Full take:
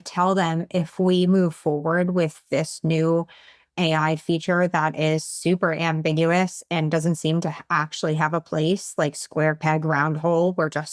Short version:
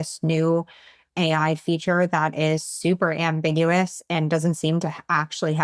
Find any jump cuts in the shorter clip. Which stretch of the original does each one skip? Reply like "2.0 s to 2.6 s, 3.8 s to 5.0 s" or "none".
none